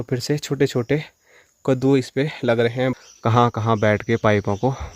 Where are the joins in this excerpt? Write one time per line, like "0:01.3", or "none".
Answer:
0:02.9